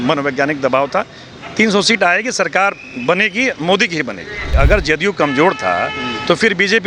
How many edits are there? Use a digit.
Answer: 1